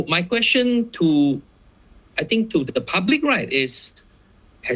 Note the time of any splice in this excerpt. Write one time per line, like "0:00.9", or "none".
none